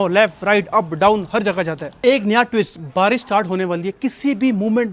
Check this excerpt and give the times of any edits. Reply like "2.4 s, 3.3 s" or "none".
1.9 s